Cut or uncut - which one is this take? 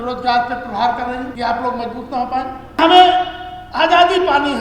cut